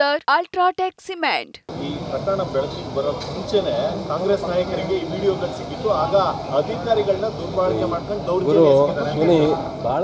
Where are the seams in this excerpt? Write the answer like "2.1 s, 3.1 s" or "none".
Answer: 1.6 s